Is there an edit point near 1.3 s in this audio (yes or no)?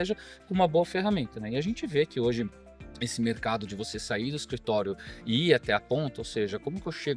no